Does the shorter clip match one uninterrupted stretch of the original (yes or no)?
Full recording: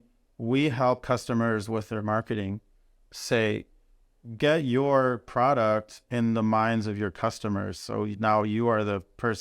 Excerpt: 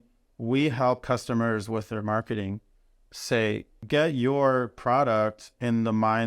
no